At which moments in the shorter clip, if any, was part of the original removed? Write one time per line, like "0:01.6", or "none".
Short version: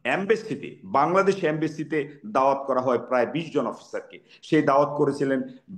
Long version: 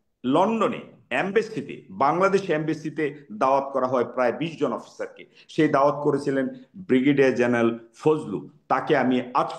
none